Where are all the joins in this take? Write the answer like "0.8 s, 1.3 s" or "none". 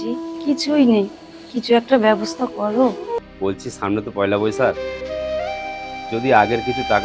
3.2 s